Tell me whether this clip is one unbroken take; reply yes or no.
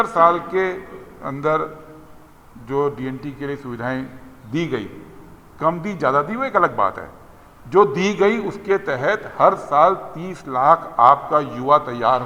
yes